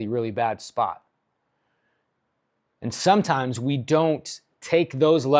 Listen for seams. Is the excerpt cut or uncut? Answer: uncut